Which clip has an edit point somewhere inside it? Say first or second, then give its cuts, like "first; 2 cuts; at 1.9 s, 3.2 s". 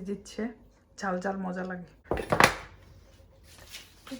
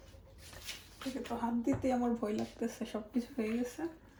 first; 1 cut; at 2.0 s